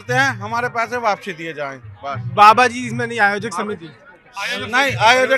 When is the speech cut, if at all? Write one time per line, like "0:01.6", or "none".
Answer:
none